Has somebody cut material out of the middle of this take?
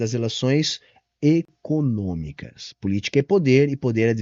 no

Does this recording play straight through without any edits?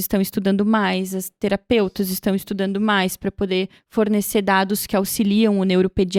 yes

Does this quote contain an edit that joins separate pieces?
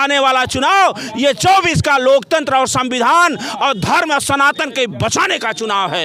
no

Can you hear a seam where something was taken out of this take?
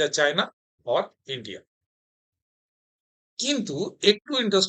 no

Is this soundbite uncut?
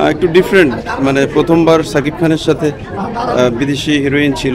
yes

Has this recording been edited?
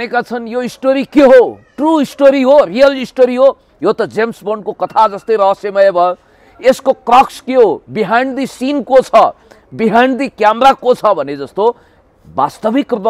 no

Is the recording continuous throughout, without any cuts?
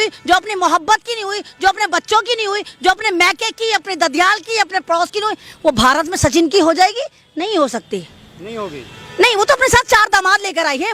yes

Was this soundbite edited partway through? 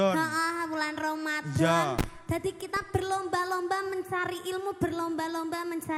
no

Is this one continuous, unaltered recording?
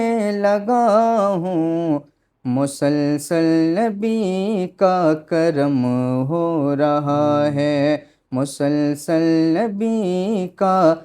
yes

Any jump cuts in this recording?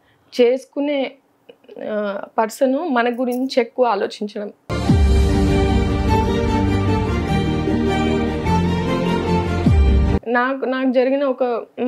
no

